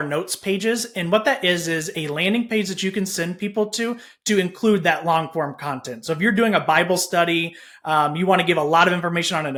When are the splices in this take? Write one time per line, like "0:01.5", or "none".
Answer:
none